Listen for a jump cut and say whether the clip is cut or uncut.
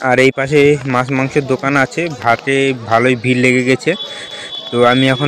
uncut